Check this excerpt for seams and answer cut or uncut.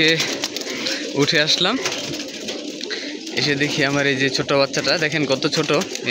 uncut